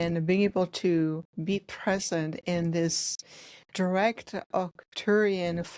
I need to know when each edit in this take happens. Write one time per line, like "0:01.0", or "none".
none